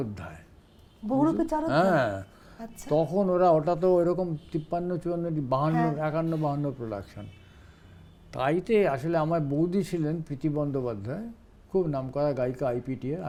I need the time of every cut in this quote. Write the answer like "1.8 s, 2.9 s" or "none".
none